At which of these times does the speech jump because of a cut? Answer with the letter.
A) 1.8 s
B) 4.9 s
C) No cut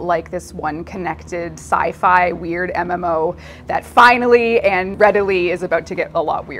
B